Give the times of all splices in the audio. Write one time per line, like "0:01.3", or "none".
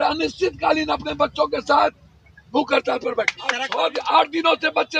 0:03.6